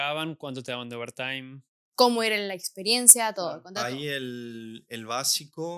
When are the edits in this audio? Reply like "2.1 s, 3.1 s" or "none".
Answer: none